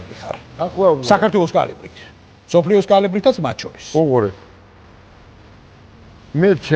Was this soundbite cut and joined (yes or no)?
no